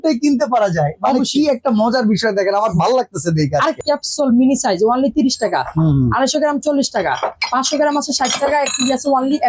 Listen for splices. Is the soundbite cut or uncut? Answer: cut